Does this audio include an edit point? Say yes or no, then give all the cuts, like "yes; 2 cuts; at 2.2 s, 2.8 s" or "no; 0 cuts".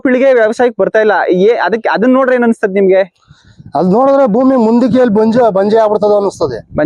no; 0 cuts